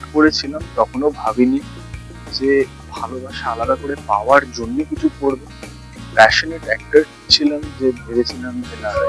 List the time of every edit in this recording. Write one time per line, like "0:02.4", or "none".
none